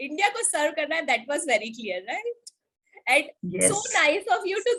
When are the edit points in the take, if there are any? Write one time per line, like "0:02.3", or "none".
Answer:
none